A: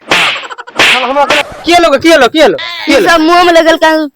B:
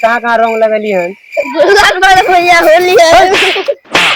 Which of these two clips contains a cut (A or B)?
A